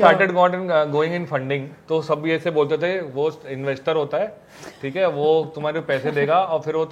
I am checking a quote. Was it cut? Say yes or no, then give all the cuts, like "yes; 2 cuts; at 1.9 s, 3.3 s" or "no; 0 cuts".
no; 0 cuts